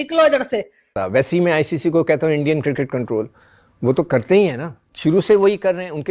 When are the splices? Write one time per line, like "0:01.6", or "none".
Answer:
0:00.9